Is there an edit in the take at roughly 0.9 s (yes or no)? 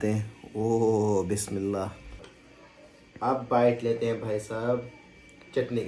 no